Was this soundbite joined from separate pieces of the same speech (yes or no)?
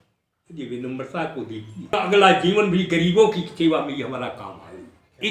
yes